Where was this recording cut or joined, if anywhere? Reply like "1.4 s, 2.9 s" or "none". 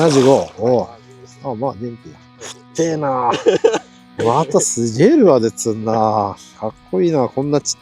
4.2 s